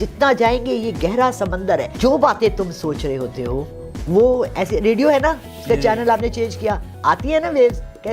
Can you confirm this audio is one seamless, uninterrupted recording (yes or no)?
no